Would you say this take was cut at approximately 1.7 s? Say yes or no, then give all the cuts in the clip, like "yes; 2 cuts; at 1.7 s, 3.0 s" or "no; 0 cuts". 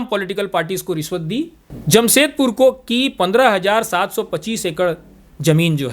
yes; 1 cut; at 1.7 s